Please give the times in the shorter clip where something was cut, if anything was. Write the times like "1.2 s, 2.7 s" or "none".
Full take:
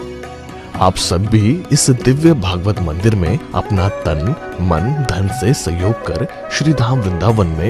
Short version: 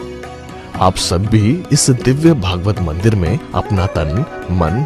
3.9 s